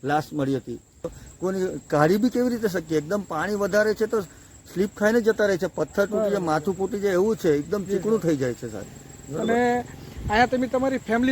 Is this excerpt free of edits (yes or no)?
no